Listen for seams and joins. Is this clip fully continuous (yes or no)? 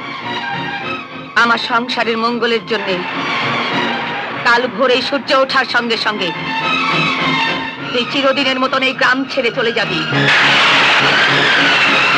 yes